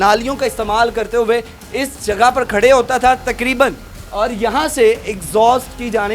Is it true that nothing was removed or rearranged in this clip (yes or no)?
yes